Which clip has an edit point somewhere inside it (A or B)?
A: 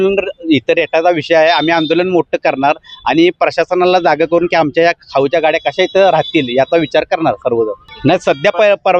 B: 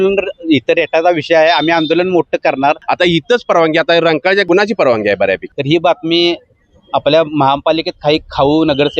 B